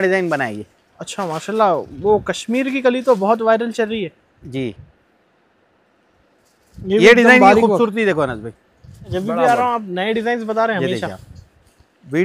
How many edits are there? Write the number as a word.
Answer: one